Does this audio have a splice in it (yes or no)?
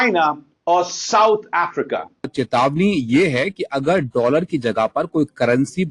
yes